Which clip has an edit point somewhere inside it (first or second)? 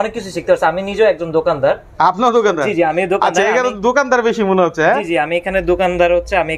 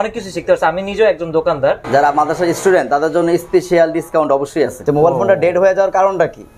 second